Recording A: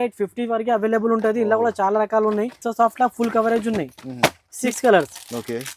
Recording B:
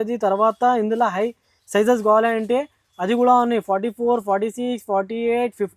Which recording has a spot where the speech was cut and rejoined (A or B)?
A